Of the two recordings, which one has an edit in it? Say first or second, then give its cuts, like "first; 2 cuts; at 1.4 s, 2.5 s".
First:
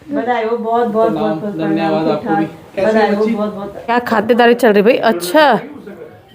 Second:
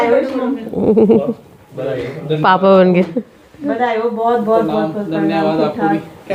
first; 1 cut; at 3.8 s